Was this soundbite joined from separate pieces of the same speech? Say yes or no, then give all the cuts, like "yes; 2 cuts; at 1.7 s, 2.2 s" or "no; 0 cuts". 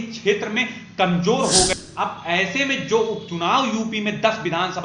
yes; 1 cut; at 1.7 s